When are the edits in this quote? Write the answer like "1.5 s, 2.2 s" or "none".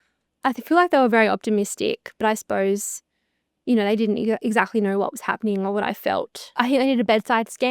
6.4 s

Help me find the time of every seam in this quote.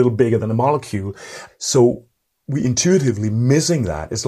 1.4 s

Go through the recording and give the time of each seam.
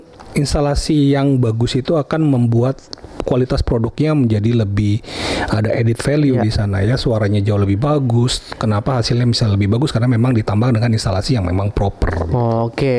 none

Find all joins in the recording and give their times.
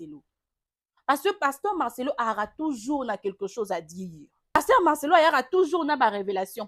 4.6 s

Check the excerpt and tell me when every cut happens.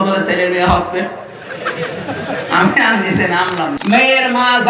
3.7 s

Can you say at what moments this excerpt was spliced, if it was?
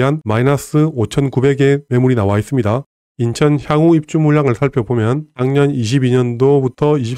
2.9 s

